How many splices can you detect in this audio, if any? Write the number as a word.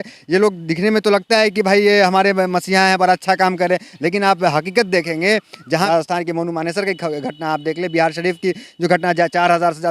one